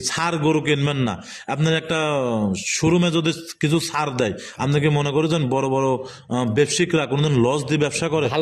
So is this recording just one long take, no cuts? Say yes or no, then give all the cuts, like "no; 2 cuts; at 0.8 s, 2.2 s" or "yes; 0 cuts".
yes; 0 cuts